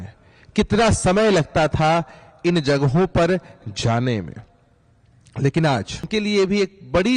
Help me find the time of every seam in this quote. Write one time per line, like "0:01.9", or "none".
0:06.1